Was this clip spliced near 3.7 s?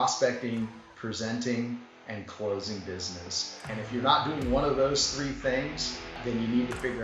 yes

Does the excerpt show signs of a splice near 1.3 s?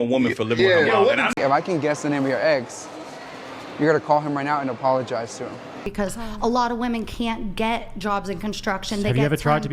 yes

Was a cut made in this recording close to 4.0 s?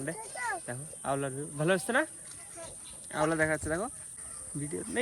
yes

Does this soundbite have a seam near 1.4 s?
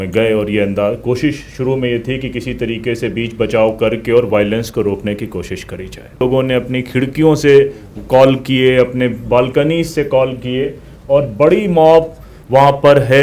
no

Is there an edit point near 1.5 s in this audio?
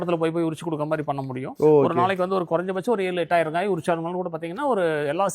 yes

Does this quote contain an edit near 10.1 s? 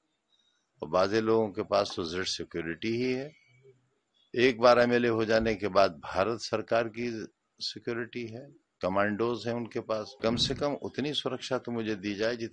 yes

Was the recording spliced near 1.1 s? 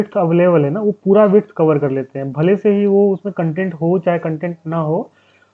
no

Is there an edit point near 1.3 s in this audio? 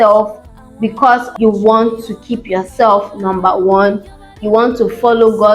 yes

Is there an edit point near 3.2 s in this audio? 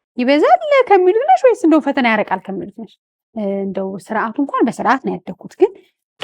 yes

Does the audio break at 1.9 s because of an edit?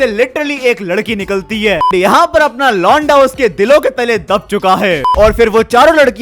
yes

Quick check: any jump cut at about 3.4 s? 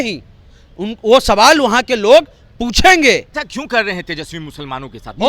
yes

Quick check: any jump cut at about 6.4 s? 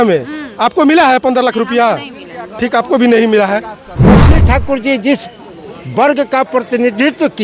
no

